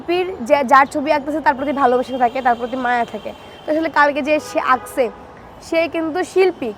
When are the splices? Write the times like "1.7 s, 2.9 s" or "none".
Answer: none